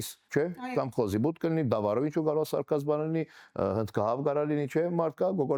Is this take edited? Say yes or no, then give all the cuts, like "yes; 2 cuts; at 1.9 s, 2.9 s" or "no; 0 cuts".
no; 0 cuts